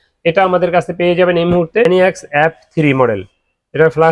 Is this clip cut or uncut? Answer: cut